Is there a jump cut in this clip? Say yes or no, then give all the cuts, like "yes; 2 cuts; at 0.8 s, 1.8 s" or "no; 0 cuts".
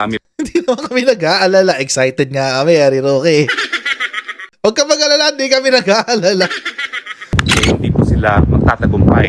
yes; 1 cut; at 7.3 s